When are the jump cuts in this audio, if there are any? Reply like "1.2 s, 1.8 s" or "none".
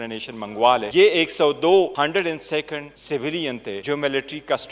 0.9 s, 1.9 s, 2.9 s, 3.8 s